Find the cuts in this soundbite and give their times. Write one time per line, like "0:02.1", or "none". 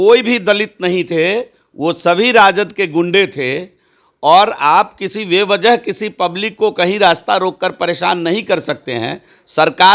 none